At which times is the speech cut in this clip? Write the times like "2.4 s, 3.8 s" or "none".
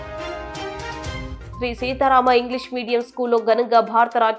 1.4 s

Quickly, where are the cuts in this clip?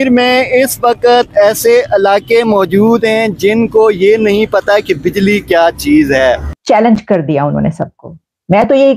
6.5 s

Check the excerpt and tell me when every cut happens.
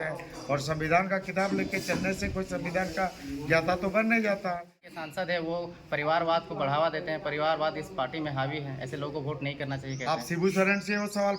4.8 s

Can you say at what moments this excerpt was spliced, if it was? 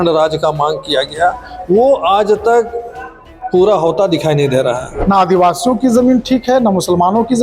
4.9 s

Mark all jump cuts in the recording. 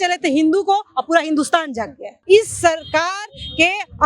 2.1 s

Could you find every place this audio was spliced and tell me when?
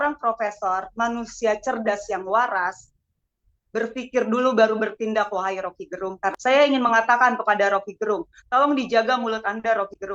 6.3 s

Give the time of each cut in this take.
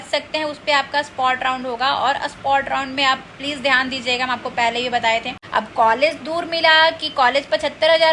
5.4 s

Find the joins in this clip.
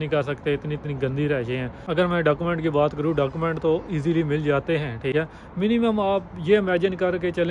1.8 s, 5.1 s

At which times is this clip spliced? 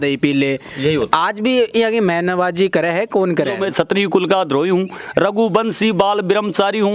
3.6 s

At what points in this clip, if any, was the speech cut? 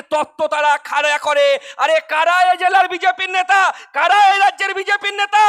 none

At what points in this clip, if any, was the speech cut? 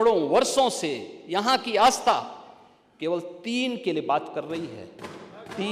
none

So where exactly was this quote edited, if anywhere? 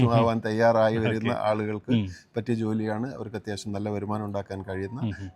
none

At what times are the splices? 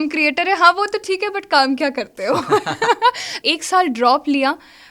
3.3 s

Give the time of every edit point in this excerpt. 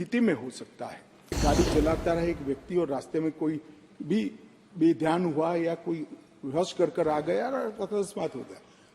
1.4 s

